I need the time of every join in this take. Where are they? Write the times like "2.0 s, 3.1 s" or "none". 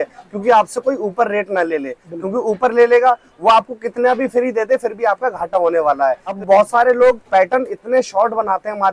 6.4 s